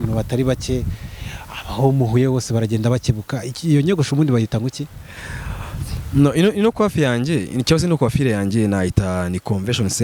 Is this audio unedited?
yes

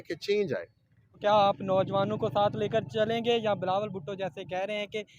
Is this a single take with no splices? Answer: no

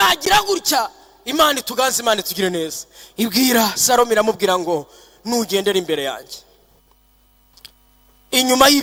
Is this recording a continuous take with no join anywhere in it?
yes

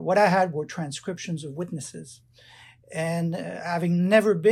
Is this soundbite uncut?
yes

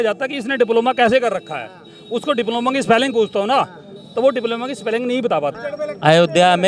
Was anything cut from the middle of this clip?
yes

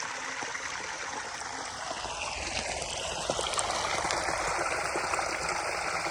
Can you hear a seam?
no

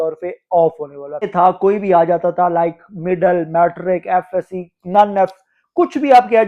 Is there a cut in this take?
yes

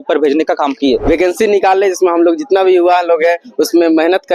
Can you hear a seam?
yes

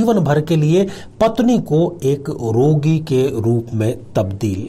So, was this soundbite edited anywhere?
no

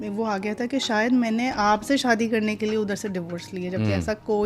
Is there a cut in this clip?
no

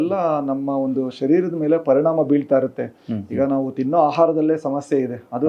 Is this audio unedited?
yes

